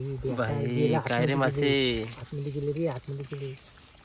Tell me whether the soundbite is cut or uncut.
uncut